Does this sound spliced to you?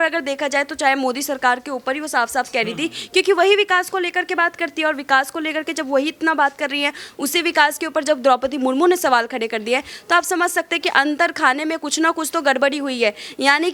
no; 0 cuts

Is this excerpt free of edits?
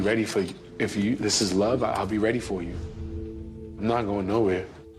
no; 1 cut; at 4.1 s

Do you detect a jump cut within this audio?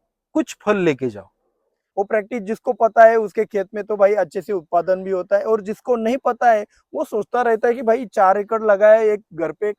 yes; 1 cut; at 1.8 s

